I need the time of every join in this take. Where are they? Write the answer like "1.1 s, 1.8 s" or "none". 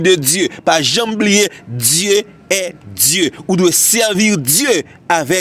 none